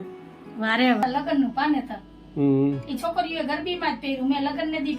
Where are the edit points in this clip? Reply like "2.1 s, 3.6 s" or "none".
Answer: 1.0 s